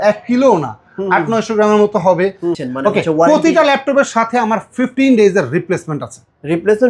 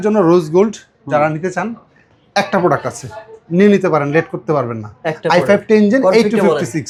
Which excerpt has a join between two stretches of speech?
first; 1 cut; at 2.6 s

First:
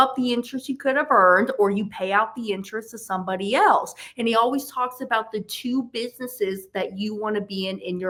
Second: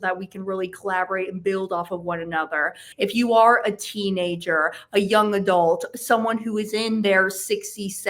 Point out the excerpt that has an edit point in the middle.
second; 1 cut; at 2.8 s

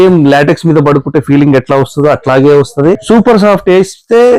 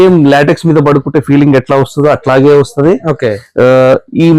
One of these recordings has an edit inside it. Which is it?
first; 1 cut; at 3.0 s

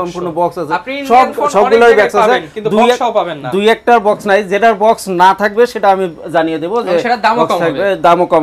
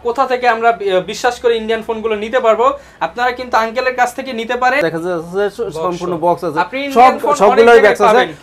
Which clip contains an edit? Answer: second; 1 cut; at 4.8 s

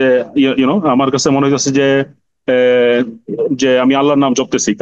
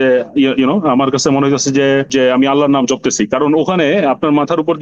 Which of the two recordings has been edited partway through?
second; 1 cut; at 2.1 s

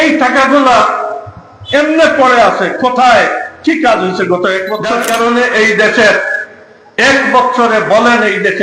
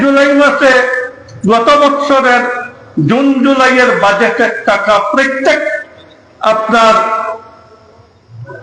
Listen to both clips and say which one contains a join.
first; 1 cut; at 5.0 s

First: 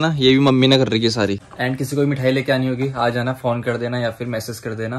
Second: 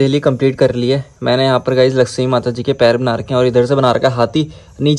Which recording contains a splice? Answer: first; 1 cut; at 1.4 s

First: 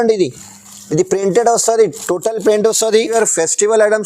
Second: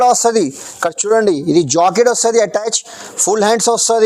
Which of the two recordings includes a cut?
first; 1 cut; at 3.1 s

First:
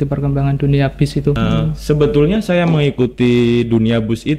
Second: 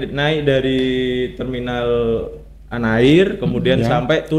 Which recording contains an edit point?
first; 1 cut; at 1.4 s

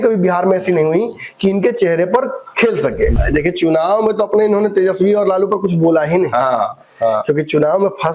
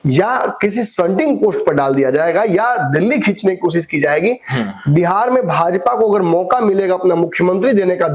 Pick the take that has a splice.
first; 1 cut; at 3.1 s

